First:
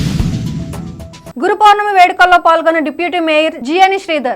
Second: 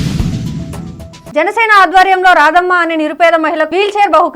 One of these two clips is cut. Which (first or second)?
second